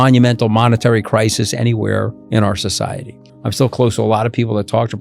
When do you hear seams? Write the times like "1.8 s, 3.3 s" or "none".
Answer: 2.2 s, 3.3 s